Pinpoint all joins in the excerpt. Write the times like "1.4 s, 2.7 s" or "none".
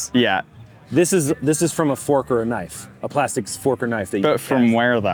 none